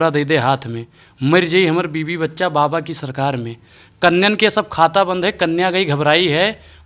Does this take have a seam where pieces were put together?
no; 0 cuts

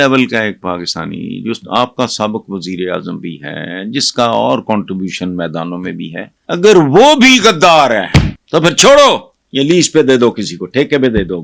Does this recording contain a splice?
yes; 3 cuts; at 6.3 s, 8.4 s, 9.4 s

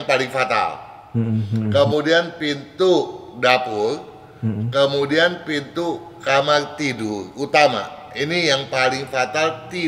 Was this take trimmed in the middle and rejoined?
no; 0 cuts

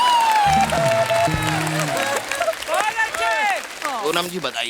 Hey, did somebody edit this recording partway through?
yes; 1 cut; at 3.7 s

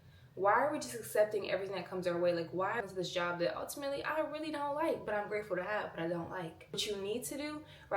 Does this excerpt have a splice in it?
yes; 2 cuts; at 2.8 s, 6.8 s

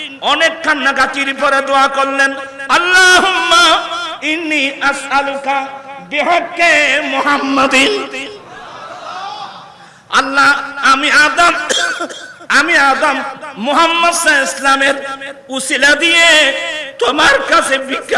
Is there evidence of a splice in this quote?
no; 0 cuts

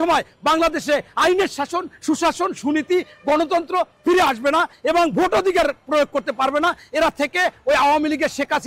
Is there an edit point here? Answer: no; 0 cuts

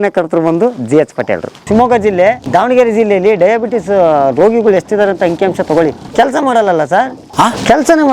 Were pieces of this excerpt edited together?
yes; 4 cuts; at 1.6 s, 2.4 s, 6.1 s, 7.2 s

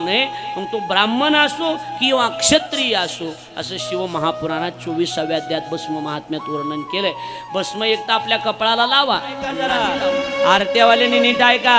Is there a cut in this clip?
yes; 1 cut; at 9.6 s

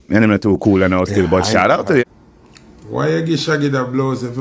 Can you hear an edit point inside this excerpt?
yes; 1 cut; at 2.0 s

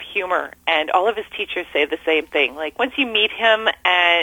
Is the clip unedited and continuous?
no; 1 cut; at 2.6 s

